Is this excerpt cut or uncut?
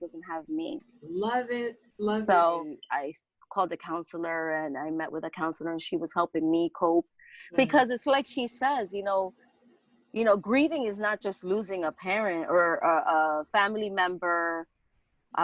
uncut